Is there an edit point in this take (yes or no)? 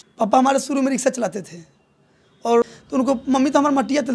yes